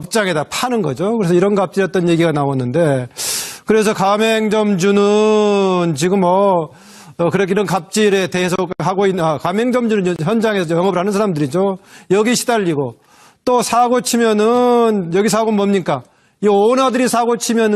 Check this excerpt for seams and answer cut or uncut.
cut